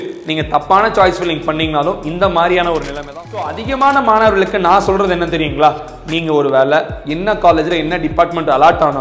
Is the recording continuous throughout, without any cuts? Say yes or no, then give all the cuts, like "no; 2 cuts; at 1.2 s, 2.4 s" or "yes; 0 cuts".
no; 1 cut; at 3.0 s